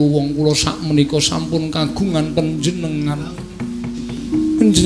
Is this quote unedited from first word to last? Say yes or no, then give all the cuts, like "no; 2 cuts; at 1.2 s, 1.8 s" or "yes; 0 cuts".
yes; 0 cuts